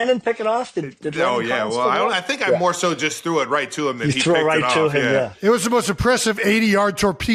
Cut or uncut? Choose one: uncut